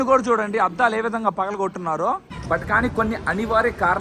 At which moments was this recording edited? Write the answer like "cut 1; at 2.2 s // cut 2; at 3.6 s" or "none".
cut 1; at 2.3 s